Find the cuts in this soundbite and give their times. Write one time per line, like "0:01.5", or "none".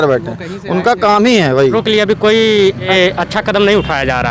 0:01.8
0:02.9